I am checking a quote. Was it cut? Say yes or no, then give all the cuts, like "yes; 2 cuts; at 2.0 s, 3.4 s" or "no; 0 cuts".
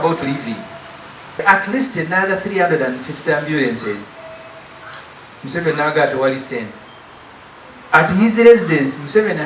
yes; 1 cut; at 1.4 s